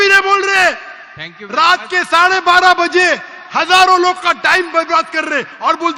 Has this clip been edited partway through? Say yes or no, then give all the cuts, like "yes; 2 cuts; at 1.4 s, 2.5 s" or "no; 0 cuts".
no; 0 cuts